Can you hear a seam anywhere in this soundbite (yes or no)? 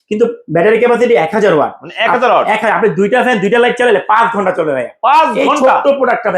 no